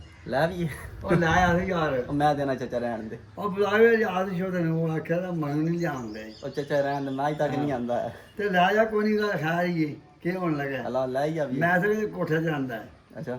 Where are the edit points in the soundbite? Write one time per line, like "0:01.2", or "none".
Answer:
none

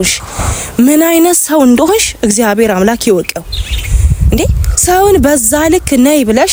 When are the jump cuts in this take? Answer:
none

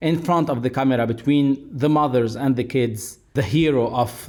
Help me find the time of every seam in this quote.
none

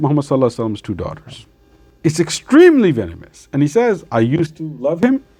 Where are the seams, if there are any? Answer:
none

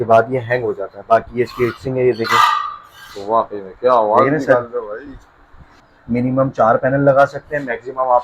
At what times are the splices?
0:05.9

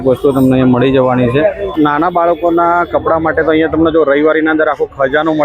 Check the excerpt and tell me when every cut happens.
0:01.6

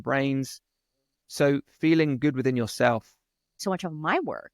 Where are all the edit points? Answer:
0:03.6

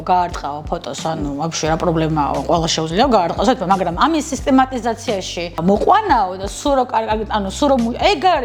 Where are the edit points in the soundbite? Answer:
0:05.6

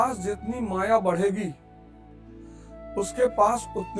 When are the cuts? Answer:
0:01.5
0:02.9

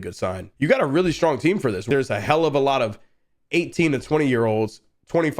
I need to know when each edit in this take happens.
0:01.9

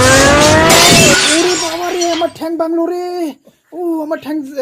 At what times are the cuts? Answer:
none

